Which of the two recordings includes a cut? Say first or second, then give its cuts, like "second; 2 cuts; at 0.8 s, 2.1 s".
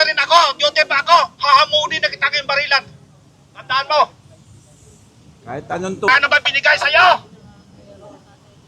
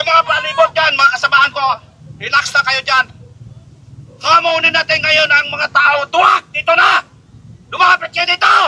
first; 1 cut; at 6.1 s